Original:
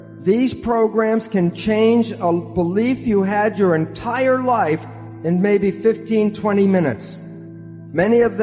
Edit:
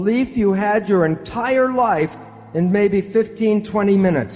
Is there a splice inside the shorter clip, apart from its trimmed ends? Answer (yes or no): no